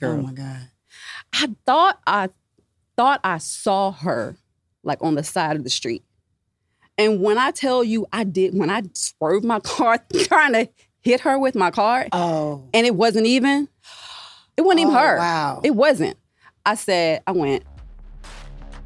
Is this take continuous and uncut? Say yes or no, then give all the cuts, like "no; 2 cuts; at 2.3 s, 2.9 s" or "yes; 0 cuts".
yes; 0 cuts